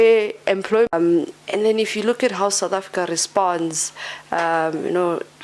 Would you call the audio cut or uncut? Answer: cut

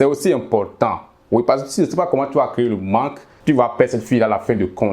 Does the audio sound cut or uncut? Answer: cut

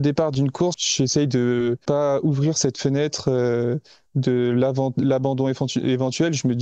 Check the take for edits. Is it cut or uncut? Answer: cut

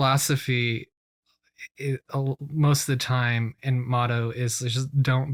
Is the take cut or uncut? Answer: uncut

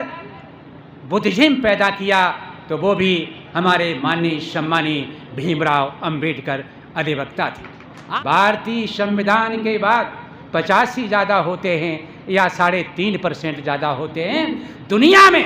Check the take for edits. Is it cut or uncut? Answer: cut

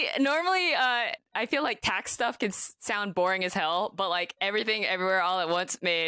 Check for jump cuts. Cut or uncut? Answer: cut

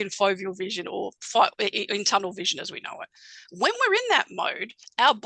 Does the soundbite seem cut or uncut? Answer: uncut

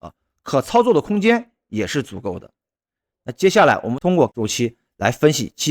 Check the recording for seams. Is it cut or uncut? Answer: cut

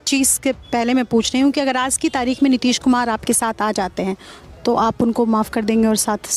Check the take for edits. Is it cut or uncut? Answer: uncut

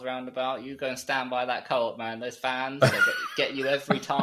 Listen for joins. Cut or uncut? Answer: uncut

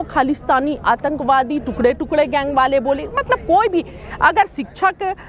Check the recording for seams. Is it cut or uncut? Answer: uncut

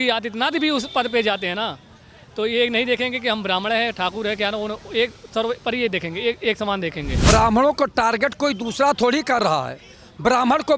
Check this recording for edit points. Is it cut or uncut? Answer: cut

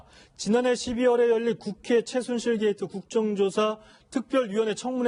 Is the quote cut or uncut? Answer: uncut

